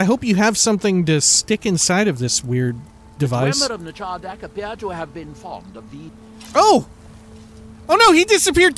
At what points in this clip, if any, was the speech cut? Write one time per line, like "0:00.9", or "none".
0:06.3